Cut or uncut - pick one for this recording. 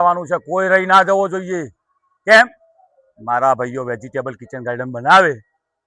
uncut